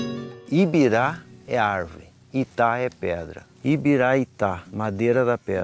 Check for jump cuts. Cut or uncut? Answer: uncut